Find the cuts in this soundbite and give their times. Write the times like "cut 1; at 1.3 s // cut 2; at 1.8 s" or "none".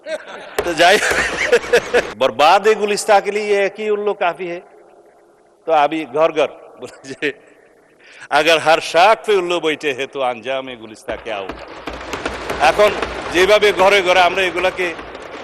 cut 1; at 2.1 s

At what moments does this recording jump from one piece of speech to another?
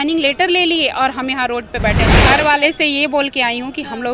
cut 1; at 2.2 s

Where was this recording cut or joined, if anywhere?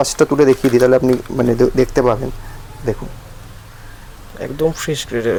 none

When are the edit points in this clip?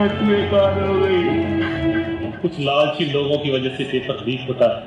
cut 1; at 2.3 s

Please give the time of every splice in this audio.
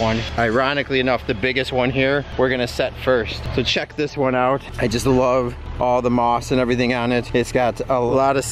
none

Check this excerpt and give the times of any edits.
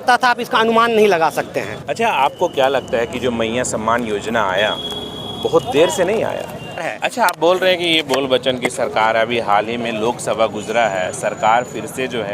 cut 1; at 1.8 s // cut 2; at 6.9 s

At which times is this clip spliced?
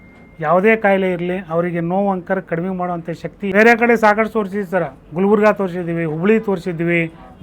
cut 1; at 3.5 s

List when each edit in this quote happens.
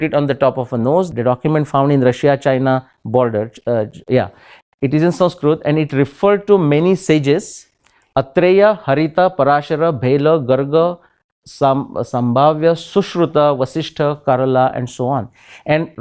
cut 1; at 1.1 s

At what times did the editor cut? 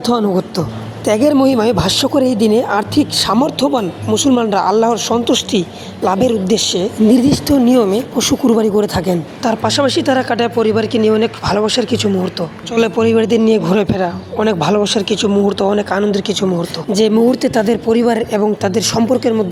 none

